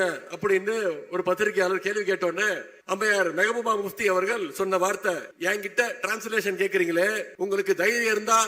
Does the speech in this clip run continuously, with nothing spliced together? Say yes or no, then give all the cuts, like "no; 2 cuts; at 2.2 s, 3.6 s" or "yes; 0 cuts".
no; 3 cuts; at 2.7 s, 5.3 s, 7.3 s